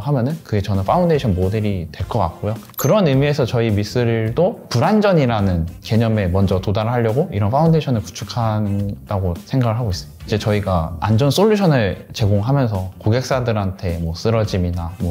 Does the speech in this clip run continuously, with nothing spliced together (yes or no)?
yes